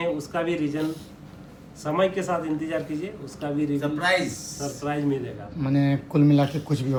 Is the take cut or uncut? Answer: uncut